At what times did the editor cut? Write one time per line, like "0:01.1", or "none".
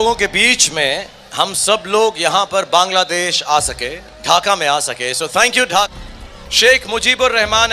0:05.9